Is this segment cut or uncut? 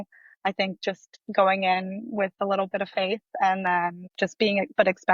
cut